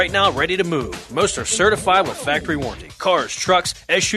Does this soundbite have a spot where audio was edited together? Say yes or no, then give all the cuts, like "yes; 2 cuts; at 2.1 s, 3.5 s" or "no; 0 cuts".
no; 0 cuts